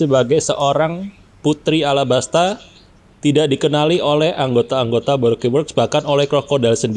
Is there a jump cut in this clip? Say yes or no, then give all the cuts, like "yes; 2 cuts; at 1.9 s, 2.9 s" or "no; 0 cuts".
no; 0 cuts